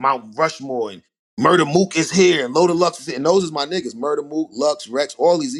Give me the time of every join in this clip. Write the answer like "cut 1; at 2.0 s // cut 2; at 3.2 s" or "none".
none